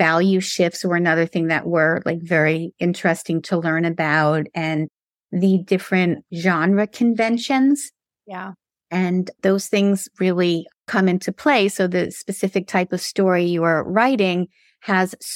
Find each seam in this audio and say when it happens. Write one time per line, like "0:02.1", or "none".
none